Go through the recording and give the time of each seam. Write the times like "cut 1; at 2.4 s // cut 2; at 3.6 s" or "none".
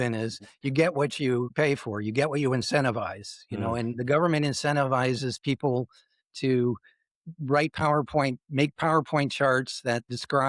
cut 1; at 1.5 s